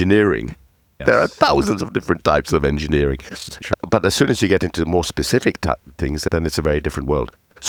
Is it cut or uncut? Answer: uncut